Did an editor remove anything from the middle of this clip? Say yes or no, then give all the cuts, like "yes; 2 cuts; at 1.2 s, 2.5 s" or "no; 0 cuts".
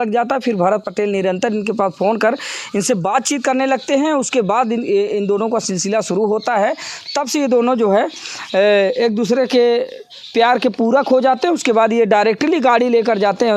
no; 0 cuts